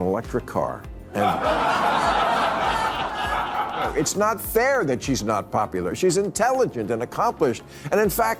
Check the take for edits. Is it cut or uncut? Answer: uncut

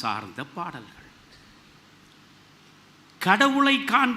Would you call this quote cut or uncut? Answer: cut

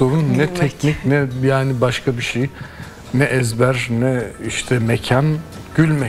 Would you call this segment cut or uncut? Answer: uncut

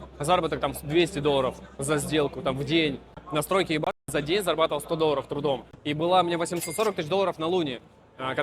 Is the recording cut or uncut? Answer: cut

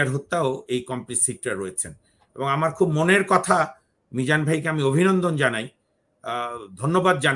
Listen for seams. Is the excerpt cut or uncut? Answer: uncut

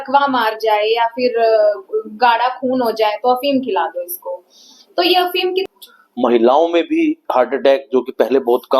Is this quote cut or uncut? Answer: cut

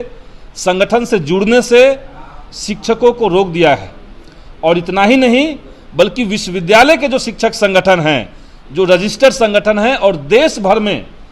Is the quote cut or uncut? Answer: uncut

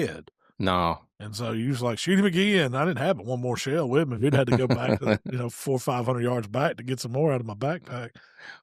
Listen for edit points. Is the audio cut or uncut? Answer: uncut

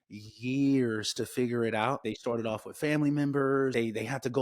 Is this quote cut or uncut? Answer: cut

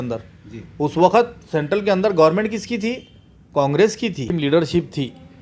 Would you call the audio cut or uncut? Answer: cut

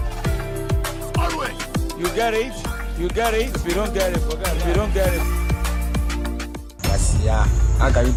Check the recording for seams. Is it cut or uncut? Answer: uncut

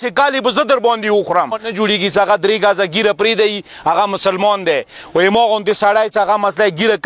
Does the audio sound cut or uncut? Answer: cut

